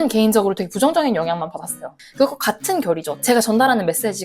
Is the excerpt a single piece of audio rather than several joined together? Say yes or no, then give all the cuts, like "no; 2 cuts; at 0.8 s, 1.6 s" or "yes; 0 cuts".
no; 2 cuts; at 2.0 s, 3.2 s